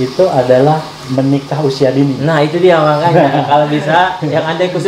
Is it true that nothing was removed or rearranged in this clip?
yes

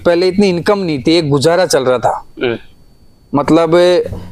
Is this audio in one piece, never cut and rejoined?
yes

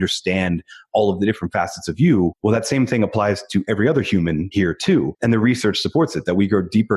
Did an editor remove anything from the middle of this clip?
yes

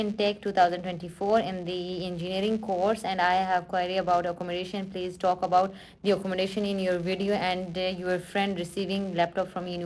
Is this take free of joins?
yes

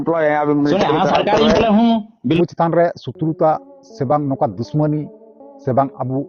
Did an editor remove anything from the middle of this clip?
yes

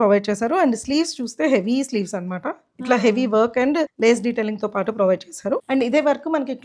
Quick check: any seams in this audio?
yes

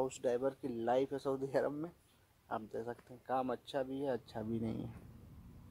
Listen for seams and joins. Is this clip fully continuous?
yes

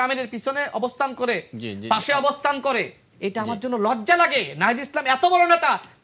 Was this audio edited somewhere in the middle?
no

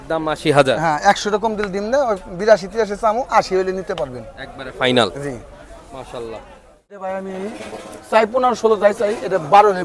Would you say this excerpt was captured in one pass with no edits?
no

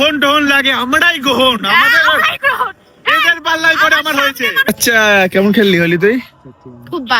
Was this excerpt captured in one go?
no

